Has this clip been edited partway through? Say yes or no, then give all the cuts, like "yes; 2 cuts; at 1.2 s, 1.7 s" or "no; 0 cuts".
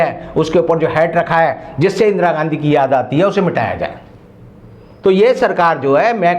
no; 0 cuts